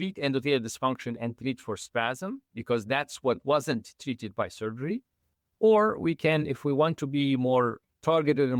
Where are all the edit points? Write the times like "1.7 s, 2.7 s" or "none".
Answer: none